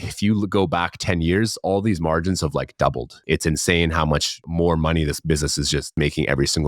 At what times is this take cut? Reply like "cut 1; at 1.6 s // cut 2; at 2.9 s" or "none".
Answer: cut 1; at 3.2 s // cut 2; at 4.4 s // cut 3; at 5.9 s